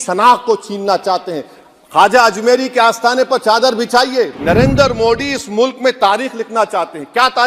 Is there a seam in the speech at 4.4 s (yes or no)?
yes